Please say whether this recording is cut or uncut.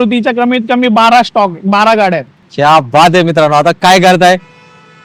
uncut